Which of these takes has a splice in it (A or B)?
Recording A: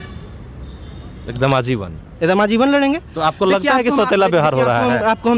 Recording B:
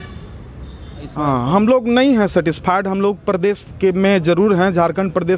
B